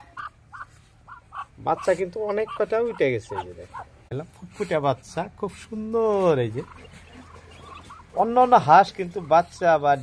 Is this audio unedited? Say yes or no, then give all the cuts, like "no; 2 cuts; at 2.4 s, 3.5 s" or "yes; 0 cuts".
no; 1 cut; at 4.0 s